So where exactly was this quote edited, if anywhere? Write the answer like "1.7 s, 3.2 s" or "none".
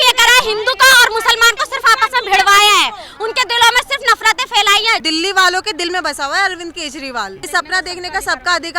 5.0 s, 7.4 s